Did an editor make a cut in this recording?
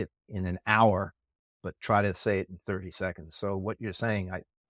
no; 0 cuts

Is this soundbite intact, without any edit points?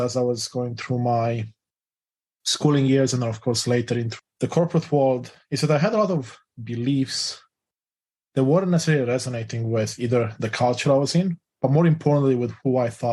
no; 1 cut; at 4.2 s

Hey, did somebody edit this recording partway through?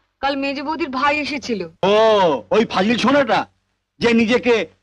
no; 0 cuts

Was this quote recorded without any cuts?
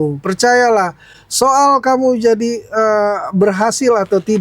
yes; 0 cuts

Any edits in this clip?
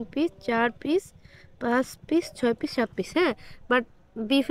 no; 0 cuts

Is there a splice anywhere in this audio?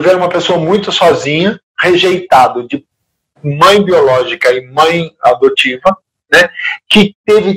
no; 0 cuts

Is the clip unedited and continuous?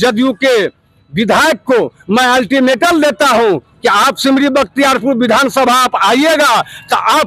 yes; 0 cuts

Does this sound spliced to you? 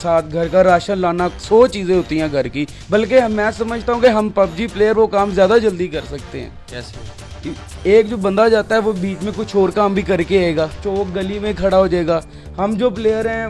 no; 0 cuts

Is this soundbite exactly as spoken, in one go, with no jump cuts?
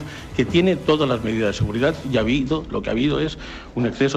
yes; 0 cuts

